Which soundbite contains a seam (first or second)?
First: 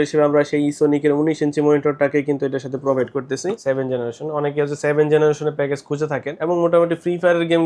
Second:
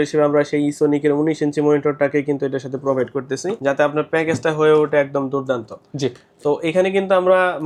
first